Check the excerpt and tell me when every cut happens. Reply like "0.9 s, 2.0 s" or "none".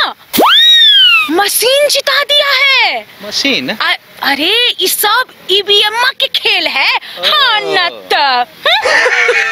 none